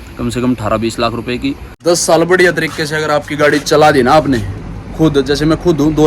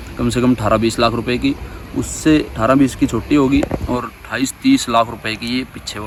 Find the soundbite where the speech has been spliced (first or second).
first